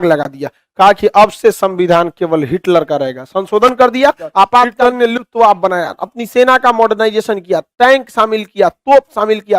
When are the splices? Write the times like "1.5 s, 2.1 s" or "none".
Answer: 4.7 s